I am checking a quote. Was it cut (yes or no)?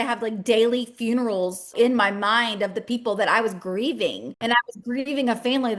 yes